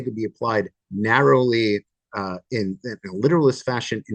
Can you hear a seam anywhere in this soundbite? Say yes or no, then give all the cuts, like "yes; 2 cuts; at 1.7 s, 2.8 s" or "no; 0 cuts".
no; 0 cuts